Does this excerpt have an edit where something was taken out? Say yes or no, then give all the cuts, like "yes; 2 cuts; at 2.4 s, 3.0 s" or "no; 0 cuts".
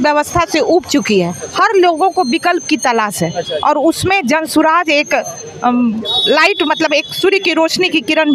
no; 0 cuts